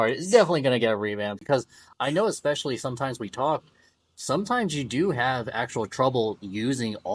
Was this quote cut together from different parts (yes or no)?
yes